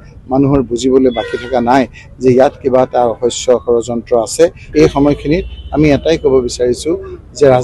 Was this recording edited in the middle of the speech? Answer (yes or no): yes